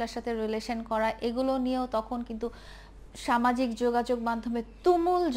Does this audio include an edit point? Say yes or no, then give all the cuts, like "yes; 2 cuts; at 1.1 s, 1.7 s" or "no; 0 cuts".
no; 0 cuts